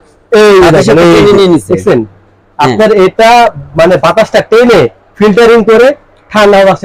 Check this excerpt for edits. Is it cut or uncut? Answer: uncut